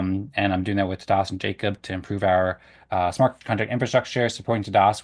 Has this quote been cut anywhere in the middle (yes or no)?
yes